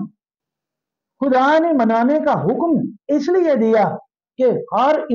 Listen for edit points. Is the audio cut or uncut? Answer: uncut